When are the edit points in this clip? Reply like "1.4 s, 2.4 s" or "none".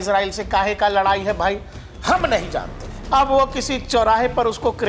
2.8 s